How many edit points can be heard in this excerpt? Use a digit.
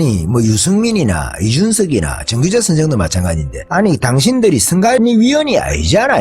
2